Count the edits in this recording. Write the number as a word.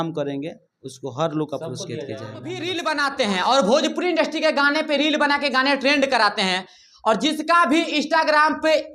one